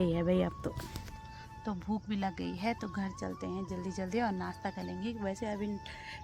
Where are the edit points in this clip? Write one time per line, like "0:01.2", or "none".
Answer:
none